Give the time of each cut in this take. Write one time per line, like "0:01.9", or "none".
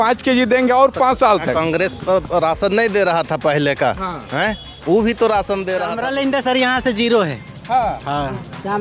0:05.9